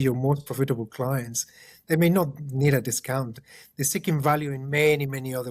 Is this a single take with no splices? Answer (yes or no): yes